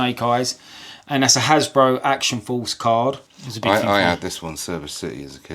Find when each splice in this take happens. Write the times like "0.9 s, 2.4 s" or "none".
3.2 s